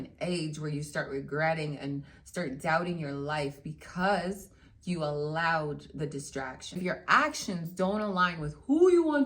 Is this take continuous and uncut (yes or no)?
no